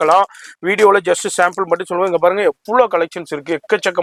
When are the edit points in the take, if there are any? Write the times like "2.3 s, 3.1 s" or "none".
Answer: none